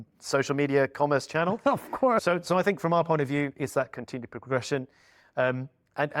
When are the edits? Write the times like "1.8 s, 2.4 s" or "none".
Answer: 2.2 s